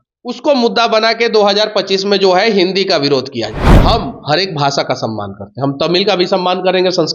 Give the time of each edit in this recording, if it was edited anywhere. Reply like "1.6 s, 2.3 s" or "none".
3.6 s